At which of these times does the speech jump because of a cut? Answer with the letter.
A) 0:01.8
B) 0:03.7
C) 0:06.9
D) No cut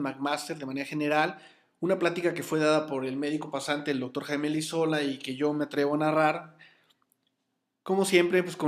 C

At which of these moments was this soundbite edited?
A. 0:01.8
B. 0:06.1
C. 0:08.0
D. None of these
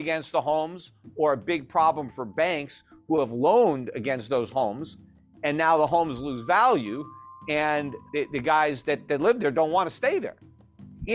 C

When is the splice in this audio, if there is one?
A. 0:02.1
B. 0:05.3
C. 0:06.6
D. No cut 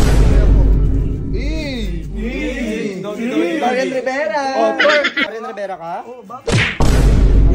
B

